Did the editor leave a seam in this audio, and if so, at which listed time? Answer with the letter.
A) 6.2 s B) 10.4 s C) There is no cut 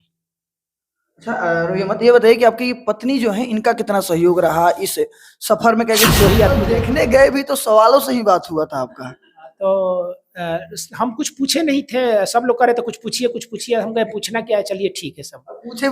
A